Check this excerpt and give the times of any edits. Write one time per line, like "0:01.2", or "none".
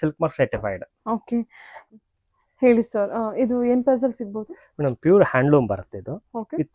0:01.9